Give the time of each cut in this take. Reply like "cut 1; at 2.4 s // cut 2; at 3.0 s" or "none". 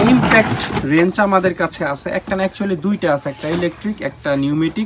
none

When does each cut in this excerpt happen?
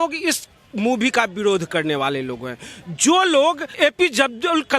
cut 1; at 3.7 s

